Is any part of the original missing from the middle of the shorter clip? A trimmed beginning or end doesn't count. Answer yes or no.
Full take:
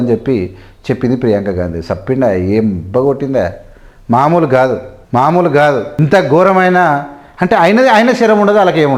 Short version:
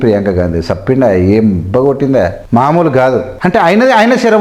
yes